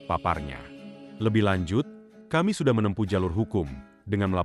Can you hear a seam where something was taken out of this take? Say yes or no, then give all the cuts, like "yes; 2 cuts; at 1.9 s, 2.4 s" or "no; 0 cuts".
yes; 1 cut; at 1.1 s